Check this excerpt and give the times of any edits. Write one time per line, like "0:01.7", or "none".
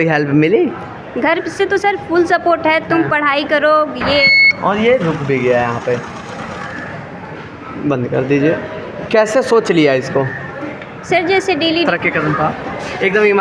0:04.2
0:11.9